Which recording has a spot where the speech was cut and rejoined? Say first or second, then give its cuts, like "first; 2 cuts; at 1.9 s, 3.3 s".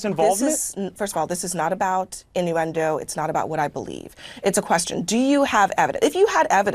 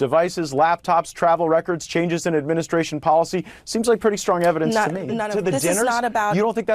second; 1 cut; at 5.2 s